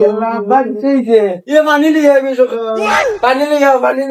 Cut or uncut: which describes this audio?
uncut